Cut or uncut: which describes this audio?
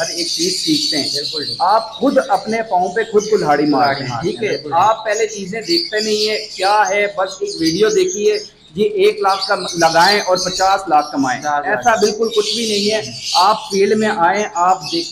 uncut